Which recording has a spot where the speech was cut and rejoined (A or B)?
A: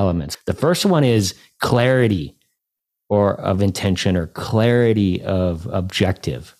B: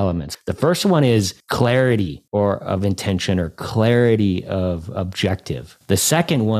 B